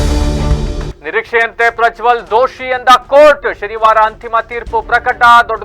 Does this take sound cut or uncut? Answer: cut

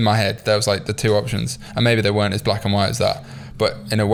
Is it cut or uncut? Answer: uncut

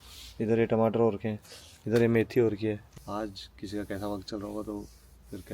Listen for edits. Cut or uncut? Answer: cut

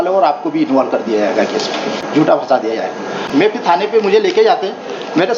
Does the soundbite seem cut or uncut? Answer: cut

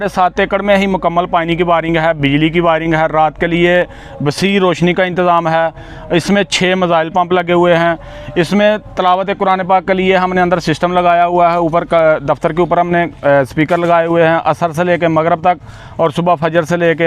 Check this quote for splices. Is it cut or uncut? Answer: uncut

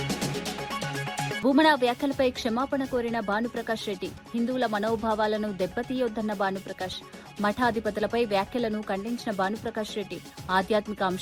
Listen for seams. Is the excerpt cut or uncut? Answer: cut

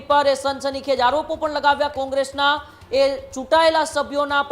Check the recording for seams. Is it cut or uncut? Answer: cut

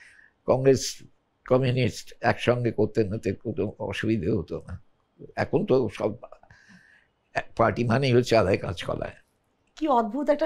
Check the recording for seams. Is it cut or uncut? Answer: uncut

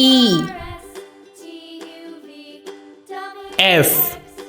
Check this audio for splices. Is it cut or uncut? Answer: uncut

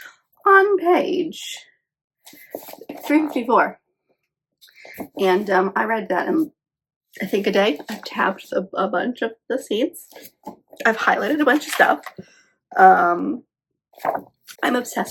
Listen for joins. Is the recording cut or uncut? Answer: uncut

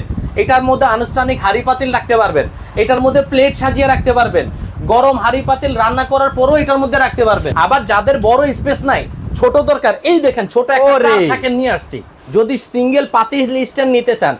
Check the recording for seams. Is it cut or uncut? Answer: cut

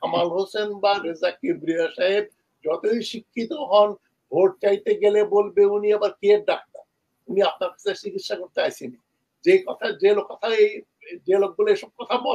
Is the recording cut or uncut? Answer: uncut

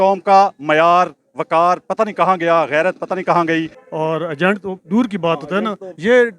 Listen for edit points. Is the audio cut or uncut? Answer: cut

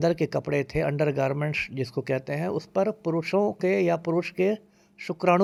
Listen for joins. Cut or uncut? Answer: uncut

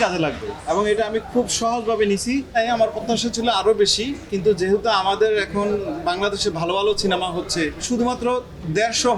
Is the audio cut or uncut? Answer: cut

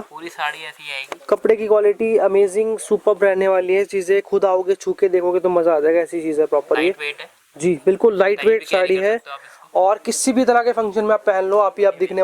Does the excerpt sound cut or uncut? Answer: uncut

